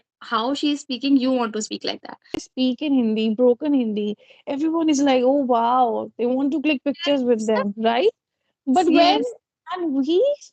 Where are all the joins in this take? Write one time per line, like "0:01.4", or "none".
0:02.4